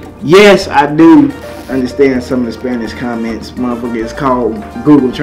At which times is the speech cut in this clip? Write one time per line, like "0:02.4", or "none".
none